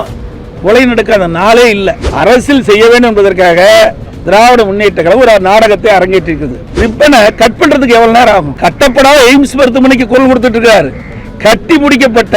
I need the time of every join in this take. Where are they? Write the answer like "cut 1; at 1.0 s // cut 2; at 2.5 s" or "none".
cut 1; at 2.0 s // cut 2; at 6.8 s // cut 3; at 8.5 s